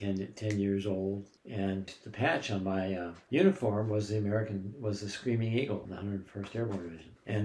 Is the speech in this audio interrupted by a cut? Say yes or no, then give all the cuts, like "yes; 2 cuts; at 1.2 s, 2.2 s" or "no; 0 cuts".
yes; 1 cut; at 1.3 s